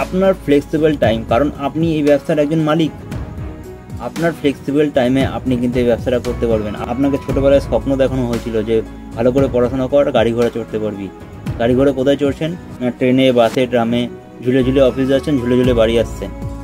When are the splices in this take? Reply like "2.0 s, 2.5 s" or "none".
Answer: 6.8 s